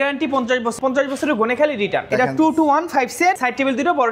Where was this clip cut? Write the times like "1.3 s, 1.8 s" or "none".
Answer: 0.8 s, 2.0 s, 3.4 s